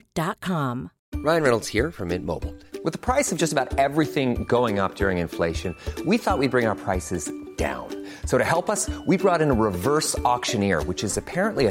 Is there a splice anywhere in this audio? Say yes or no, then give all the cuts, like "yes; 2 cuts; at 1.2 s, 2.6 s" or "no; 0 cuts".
yes; 1 cut; at 0.9 s